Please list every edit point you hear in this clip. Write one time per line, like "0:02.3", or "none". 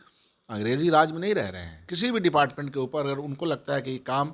0:01.9